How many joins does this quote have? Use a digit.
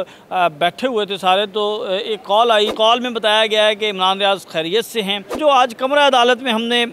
2